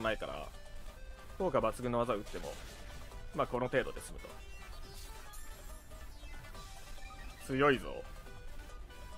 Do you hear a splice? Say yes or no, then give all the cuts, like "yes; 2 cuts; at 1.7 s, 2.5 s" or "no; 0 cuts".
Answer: no; 0 cuts